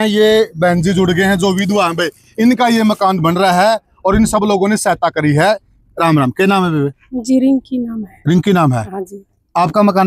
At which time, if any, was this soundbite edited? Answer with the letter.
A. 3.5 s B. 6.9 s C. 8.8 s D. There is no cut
D